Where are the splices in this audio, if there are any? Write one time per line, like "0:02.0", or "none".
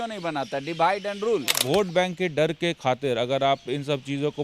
0:01.6